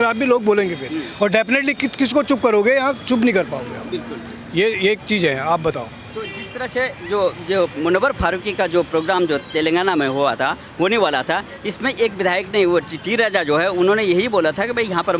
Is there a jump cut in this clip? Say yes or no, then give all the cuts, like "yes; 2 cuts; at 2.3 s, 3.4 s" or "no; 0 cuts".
no; 0 cuts